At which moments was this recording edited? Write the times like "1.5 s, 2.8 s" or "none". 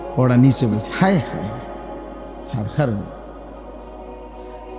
3.0 s